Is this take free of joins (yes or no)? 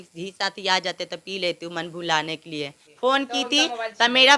no